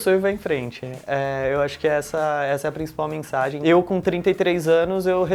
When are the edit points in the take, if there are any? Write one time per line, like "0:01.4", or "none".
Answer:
0:03.6